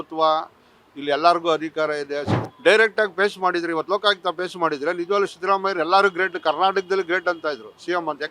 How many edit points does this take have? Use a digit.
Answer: 1